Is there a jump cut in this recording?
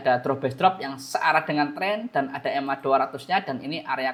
no; 0 cuts

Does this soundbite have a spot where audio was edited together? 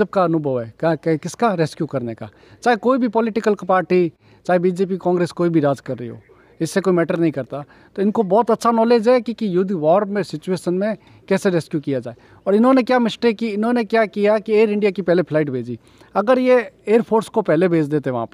no; 0 cuts

